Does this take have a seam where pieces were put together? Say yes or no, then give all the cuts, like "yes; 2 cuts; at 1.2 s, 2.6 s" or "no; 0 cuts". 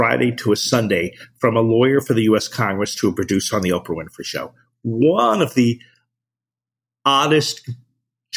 no; 0 cuts